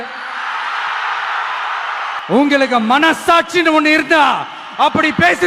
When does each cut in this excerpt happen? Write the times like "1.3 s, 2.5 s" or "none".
2.2 s